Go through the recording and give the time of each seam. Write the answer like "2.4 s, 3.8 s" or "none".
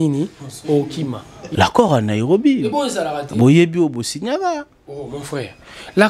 1.3 s